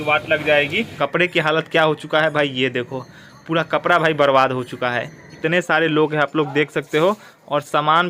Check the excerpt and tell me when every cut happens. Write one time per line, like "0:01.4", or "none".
0:00.9
0:05.3